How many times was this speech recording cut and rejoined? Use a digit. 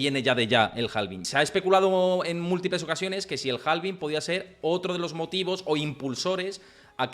1